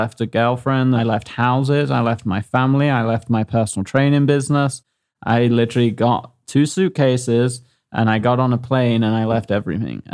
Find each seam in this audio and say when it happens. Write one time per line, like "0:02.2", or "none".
0:01.0